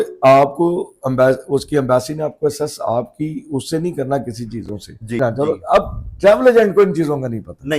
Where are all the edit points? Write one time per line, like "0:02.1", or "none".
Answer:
0:05.2